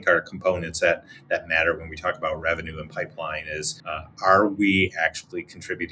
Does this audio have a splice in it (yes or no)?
yes